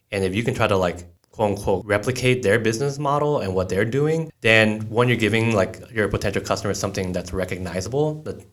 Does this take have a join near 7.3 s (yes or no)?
no